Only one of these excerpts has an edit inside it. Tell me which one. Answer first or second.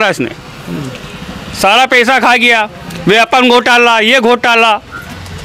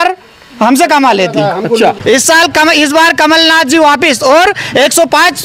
second